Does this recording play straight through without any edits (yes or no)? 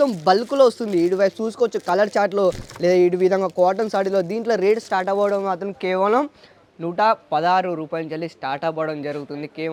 yes